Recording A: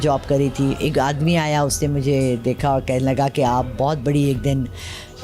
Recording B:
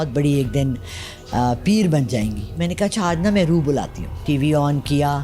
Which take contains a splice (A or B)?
B